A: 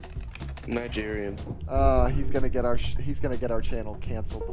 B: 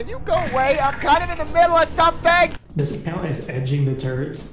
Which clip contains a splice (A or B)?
B